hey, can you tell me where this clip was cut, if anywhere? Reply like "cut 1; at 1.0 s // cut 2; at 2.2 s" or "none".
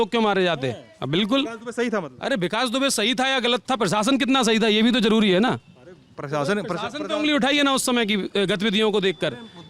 none